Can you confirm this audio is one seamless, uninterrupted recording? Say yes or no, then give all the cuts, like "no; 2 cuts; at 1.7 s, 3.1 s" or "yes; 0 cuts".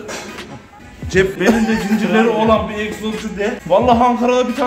yes; 0 cuts